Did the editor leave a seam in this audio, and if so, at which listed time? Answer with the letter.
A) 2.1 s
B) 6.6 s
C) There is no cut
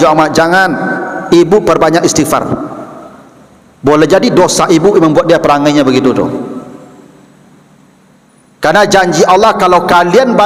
C